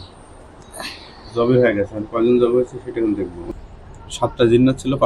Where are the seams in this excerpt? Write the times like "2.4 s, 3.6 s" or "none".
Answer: 3.5 s